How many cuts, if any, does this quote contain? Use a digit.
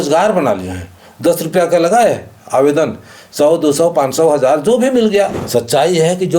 1